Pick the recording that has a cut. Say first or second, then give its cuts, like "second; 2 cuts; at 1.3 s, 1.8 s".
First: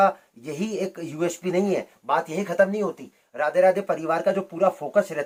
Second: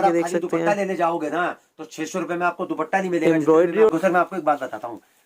second; 1 cut; at 3.9 s